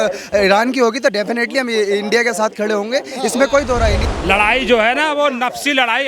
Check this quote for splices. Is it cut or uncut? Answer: cut